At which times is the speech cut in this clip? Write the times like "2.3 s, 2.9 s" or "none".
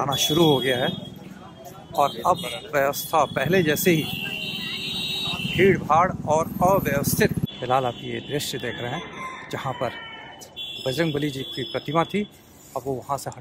7.4 s